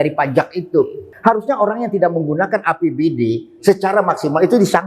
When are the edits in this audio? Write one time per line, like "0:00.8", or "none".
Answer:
0:01.1

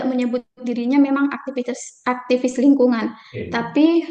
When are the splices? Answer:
none

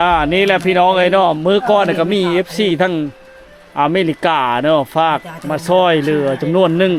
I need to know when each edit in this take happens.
none

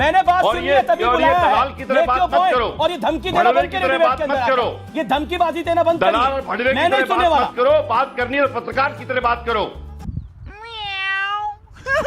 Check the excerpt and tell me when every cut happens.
0:07.9
0:10.1

